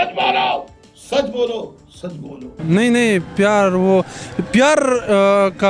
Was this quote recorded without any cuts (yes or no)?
yes